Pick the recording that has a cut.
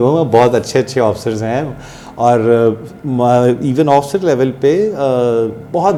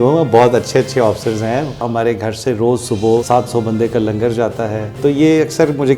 second; 3 cuts; at 1.9 s, 3.2 s, 5.0 s

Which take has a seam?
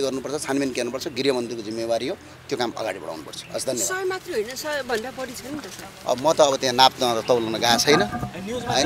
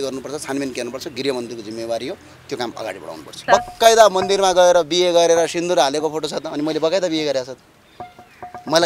second; 1 cut; at 3.3 s

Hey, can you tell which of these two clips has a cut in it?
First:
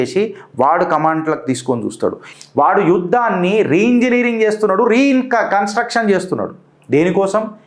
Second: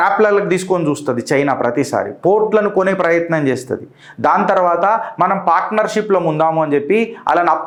first; 1 cut; at 2.2 s

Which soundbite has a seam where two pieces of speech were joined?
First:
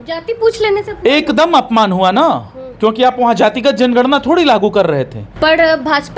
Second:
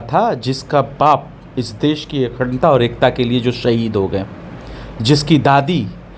first; 1 cut; at 5.2 s

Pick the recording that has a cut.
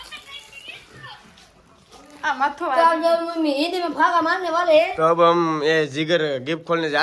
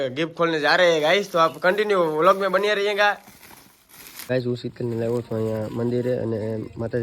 second; 1 cut; at 4.3 s

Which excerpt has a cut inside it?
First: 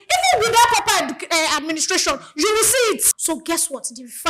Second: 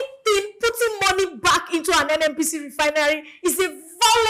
first; 1 cut; at 3.1 s

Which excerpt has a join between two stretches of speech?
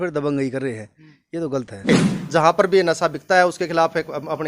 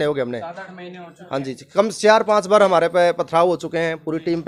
first; 1 cut; at 1.9 s

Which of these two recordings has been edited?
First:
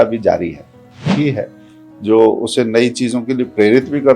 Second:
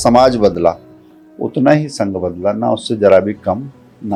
first; 1 cut; at 1.1 s

